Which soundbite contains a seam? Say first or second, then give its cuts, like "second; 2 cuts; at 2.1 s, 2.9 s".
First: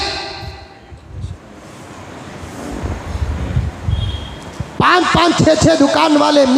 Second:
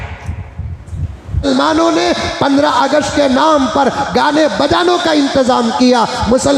second; 1 cut; at 1.4 s